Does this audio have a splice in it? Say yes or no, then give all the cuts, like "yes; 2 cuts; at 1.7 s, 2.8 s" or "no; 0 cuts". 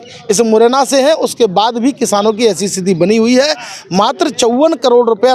no; 0 cuts